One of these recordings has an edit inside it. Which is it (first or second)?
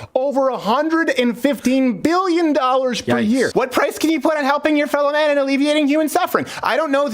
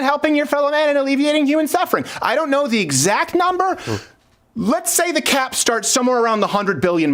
first